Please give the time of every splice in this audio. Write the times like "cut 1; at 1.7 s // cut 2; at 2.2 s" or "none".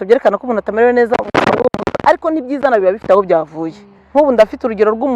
cut 1; at 4.0 s